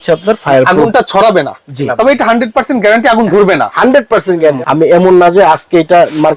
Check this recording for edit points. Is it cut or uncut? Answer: cut